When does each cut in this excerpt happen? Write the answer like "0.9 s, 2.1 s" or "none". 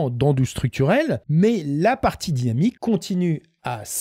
1.2 s, 2.8 s